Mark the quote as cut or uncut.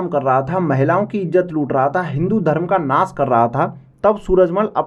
uncut